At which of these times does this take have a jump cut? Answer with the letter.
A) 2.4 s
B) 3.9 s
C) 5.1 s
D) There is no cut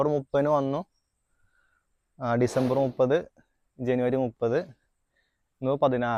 D